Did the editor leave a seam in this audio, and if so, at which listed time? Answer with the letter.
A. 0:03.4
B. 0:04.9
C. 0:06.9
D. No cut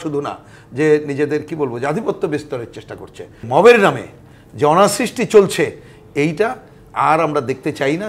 A